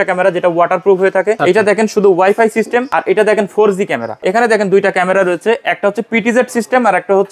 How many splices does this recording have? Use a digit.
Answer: 3